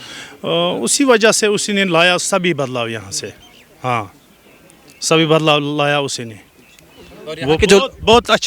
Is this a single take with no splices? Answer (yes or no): yes